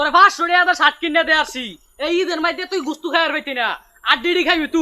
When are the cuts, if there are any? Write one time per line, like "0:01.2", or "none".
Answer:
none